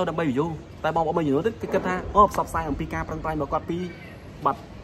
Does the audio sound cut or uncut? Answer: uncut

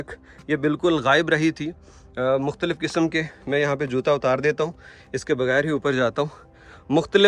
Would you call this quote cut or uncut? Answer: uncut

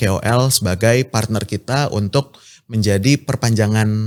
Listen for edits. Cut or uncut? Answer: uncut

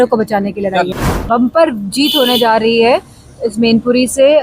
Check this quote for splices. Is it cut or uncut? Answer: cut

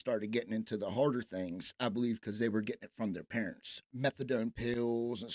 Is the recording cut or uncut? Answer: cut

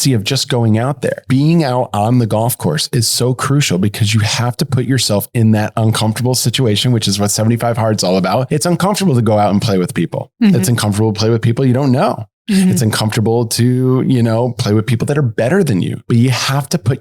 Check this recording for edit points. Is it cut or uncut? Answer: cut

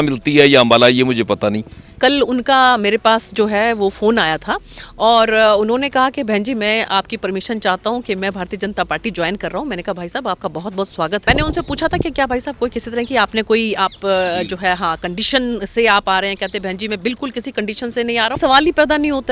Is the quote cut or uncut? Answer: cut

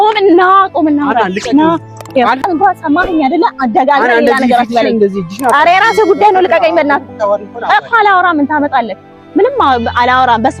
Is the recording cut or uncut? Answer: cut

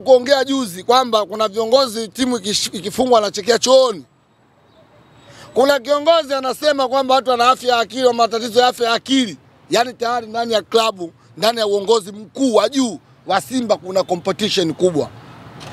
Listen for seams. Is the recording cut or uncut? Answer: uncut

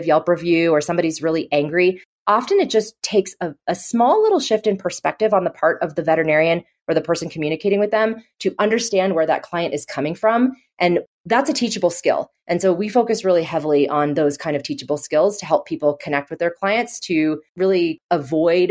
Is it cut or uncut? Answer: cut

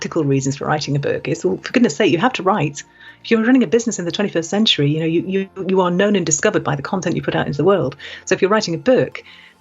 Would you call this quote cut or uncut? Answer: uncut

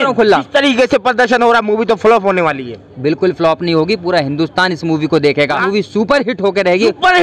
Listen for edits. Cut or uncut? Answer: cut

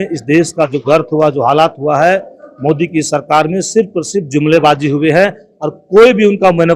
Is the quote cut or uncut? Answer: uncut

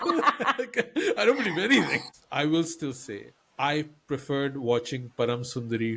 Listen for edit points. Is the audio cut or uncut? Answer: cut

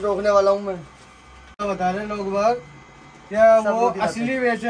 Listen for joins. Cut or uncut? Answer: cut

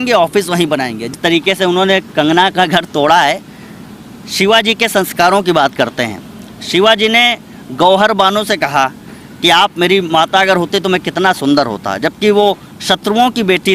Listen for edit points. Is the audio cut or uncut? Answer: cut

